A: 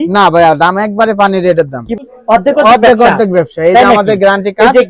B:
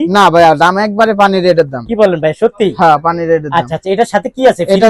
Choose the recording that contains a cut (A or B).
A